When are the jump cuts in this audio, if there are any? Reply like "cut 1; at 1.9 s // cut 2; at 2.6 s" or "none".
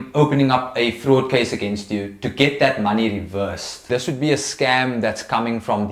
cut 1; at 3.9 s